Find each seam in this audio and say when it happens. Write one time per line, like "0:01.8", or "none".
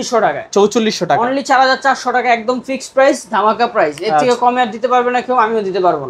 none